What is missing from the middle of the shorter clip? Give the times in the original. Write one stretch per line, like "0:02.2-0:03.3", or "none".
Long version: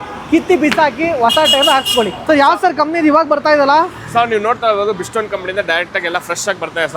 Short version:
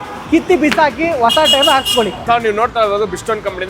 0:02.2-0:04.0